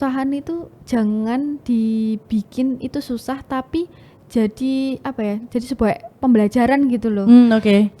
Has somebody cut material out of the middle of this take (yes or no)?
no